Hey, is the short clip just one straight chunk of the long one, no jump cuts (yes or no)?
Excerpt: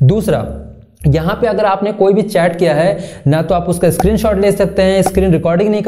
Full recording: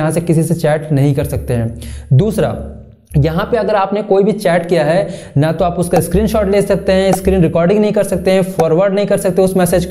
yes